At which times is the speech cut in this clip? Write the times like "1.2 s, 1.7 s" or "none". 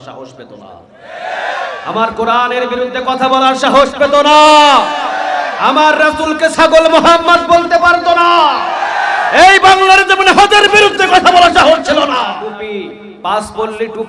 12.3 s